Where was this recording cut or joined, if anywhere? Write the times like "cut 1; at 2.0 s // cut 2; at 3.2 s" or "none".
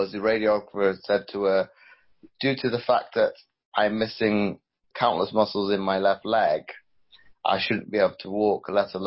cut 1; at 4.9 s